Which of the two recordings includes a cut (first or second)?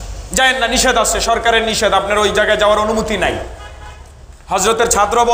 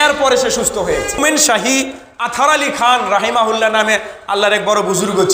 second